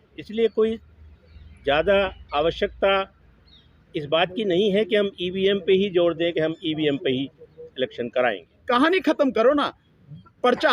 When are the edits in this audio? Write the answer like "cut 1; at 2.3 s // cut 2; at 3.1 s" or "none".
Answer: cut 1; at 8.5 s